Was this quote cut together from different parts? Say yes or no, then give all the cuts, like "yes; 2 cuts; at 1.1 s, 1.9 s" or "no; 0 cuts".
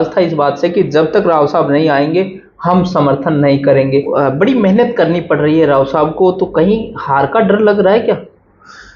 yes; 1 cut; at 4.1 s